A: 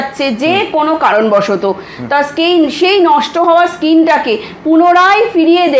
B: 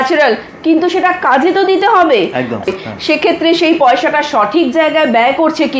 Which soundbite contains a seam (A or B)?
B